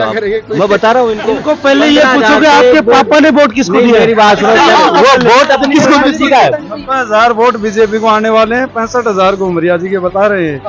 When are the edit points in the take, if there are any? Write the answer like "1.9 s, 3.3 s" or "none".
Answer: 6.6 s